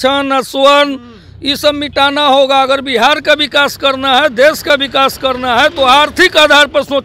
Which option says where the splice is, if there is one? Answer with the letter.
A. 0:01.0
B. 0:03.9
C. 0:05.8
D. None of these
D